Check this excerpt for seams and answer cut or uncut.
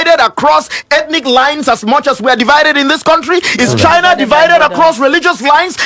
uncut